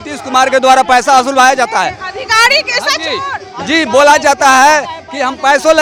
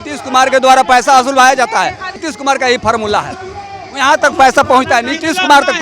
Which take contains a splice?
second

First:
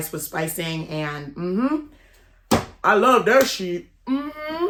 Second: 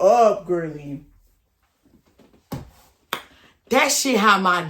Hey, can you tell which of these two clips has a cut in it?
second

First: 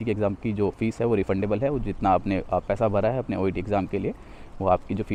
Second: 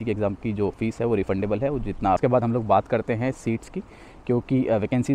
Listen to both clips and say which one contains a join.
second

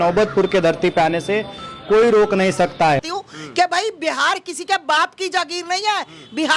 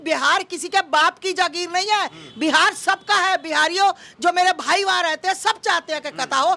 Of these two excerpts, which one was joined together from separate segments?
first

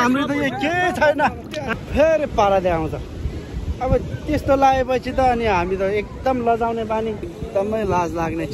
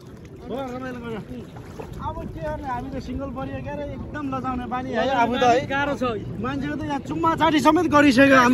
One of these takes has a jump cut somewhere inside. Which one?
first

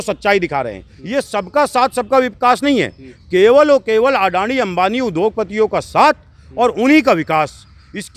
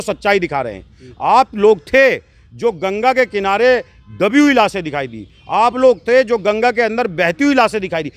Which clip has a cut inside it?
first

